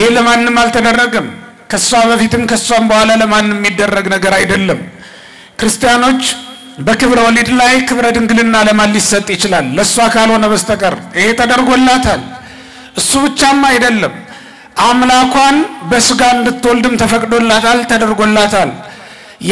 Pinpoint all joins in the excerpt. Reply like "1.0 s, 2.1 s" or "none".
none